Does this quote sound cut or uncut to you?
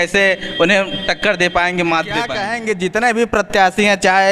cut